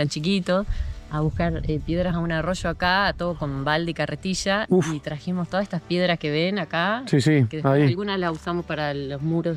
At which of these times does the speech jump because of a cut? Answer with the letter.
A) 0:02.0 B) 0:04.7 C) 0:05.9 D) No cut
D